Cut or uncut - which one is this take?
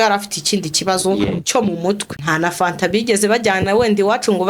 cut